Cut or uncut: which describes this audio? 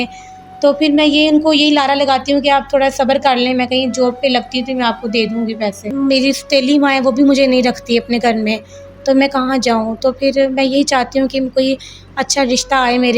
cut